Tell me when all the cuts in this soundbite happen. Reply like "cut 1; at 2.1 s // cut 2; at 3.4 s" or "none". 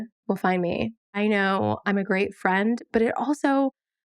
cut 1; at 1.2 s